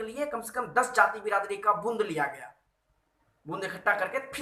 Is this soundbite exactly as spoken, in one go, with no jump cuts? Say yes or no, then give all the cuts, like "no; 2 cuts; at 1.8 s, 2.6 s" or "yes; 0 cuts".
yes; 0 cuts